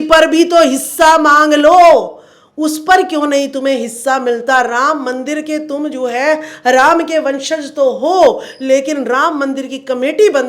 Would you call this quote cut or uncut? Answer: uncut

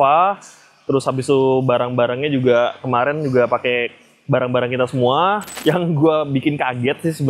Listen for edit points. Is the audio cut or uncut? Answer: cut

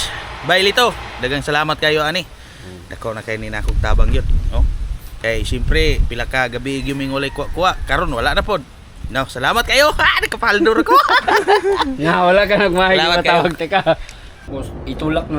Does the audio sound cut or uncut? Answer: cut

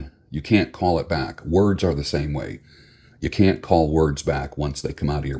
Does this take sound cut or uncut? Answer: uncut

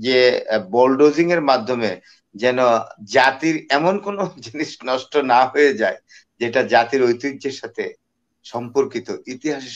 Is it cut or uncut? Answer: uncut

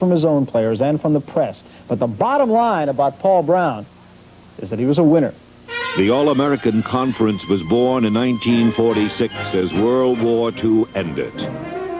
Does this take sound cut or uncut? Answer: cut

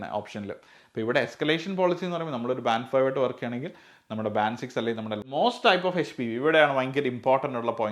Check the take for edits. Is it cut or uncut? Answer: cut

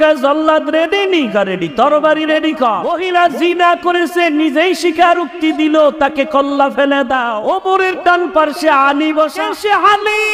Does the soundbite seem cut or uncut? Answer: cut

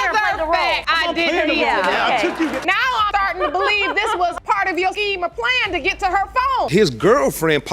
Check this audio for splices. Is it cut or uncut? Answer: cut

